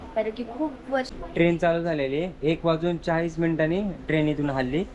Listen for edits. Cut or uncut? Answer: cut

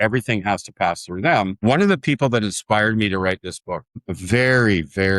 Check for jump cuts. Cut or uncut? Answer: cut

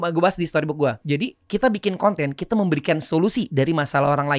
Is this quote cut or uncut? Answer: cut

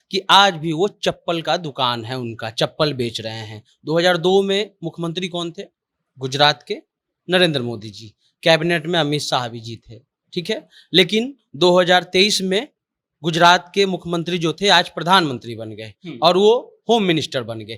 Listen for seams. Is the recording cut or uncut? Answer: uncut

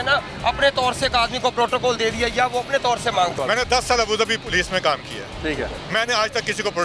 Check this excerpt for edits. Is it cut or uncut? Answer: cut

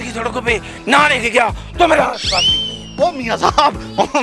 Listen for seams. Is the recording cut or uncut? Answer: uncut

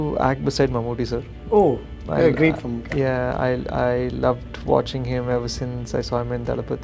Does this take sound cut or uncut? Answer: uncut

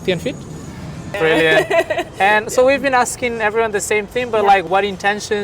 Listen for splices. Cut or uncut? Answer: cut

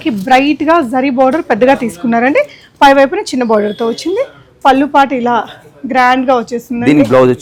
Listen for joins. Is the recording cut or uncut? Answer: uncut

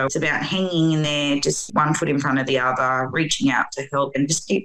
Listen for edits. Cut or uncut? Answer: uncut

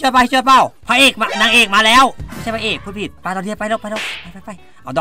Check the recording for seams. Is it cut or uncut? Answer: cut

